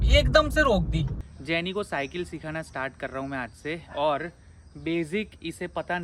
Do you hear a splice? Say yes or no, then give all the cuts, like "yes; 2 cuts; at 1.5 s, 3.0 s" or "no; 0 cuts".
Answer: yes; 1 cut; at 1.1 s